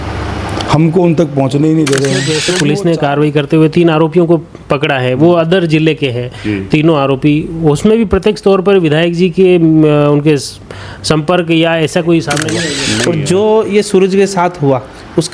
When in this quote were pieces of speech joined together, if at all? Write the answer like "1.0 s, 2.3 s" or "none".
2.5 s, 12.9 s

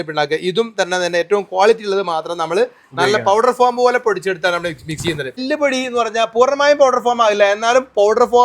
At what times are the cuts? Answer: 5.4 s

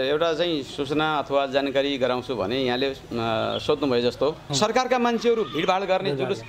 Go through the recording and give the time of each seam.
4.5 s

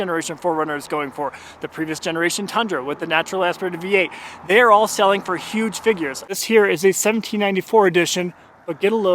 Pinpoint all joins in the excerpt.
6.3 s

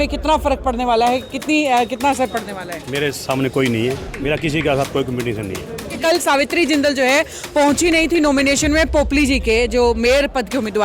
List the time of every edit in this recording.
4.1 s, 5.9 s

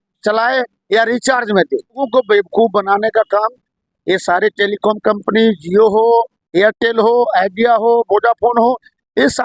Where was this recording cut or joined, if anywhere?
2.0 s

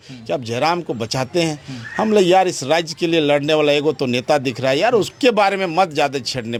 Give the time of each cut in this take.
none

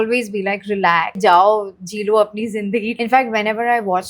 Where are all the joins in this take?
1.2 s, 2.9 s

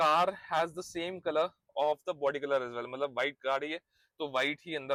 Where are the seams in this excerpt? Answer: none

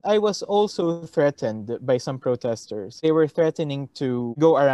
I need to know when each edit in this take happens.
3.0 s

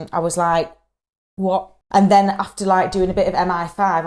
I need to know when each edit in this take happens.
1.8 s

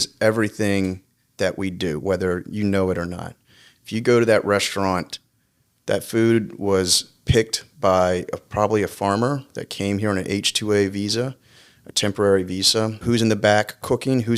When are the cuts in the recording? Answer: 13.0 s

